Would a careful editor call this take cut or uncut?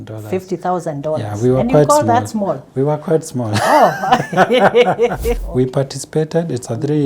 cut